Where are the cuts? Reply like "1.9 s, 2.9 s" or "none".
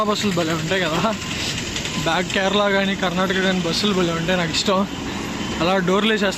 none